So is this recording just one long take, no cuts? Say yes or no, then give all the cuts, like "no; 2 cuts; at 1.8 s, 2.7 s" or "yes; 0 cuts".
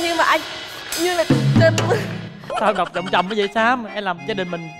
no; 1 cut; at 2.5 s